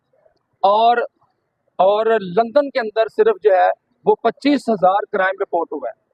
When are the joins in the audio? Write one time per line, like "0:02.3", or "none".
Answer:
none

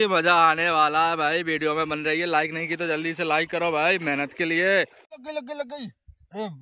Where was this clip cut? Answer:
0:05.0

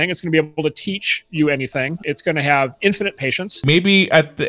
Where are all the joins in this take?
0:02.0
0:03.6

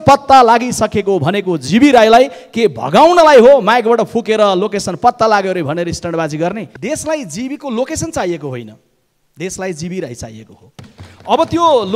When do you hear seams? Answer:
0:06.7

